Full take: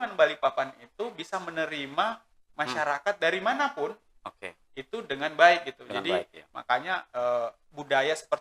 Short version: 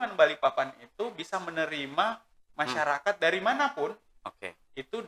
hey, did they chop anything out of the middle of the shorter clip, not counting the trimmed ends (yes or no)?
no